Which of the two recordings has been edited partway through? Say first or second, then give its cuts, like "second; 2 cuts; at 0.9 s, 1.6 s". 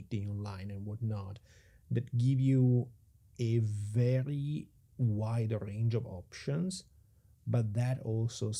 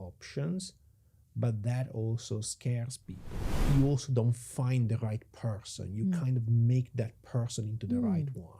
second; 1 cut; at 3.4 s